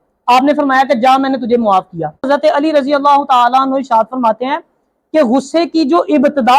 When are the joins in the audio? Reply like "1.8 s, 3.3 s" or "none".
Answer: 2.3 s